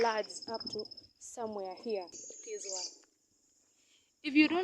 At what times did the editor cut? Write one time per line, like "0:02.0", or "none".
0:02.2

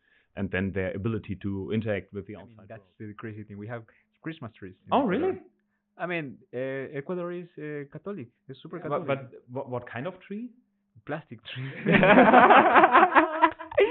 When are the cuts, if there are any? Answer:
0:02.8

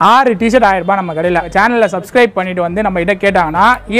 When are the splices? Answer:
0:01.5

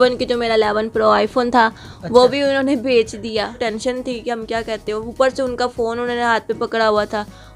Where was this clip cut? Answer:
0:03.7

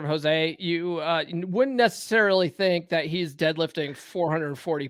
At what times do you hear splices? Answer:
none

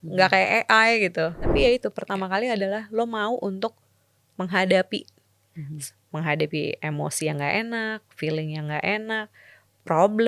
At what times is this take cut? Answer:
0:01.5

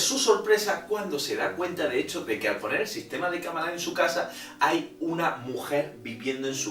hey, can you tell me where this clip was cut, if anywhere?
none

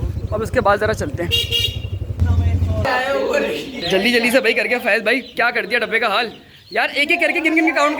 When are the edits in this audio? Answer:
0:02.9

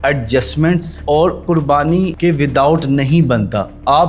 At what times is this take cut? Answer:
0:02.1

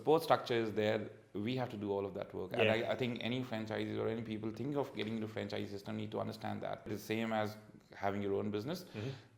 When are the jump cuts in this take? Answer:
0:06.9

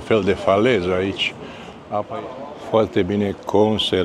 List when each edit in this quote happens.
0:02.2

